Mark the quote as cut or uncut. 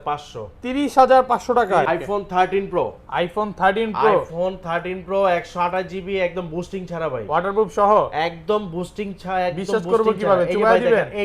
cut